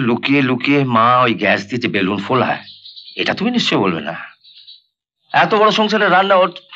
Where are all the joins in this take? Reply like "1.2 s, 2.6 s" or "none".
none